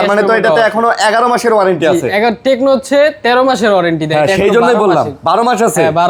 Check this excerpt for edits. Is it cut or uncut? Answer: uncut